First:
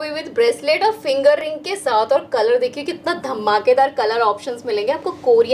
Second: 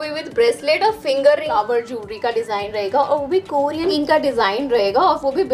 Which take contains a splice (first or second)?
second